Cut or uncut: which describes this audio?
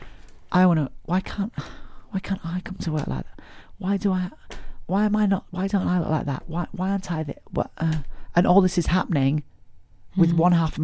uncut